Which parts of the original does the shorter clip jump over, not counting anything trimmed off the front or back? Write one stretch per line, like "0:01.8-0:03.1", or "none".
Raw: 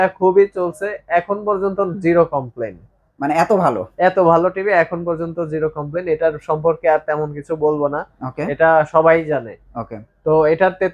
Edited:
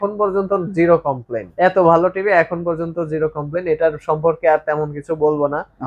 0:02.8-0:03.9